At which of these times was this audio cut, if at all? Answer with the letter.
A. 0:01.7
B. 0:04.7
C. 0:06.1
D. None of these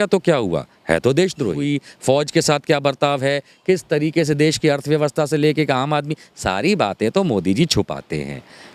A